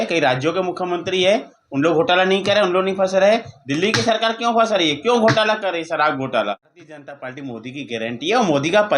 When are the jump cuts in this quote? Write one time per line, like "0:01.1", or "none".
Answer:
0:06.9